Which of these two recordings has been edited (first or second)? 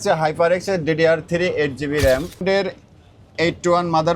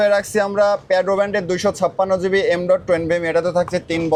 first